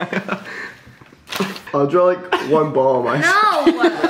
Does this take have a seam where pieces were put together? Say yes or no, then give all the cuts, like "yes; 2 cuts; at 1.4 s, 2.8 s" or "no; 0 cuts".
no; 0 cuts